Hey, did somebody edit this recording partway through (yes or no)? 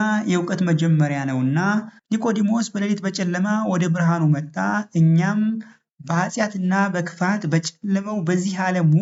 no